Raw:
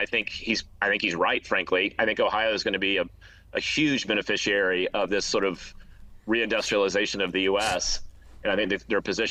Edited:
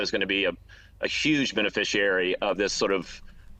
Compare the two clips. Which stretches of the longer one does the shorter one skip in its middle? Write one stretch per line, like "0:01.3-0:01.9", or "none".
none